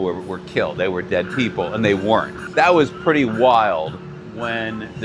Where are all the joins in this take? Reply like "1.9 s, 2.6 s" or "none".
2.4 s